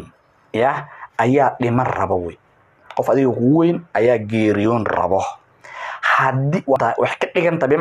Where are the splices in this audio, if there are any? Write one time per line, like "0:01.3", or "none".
0:06.8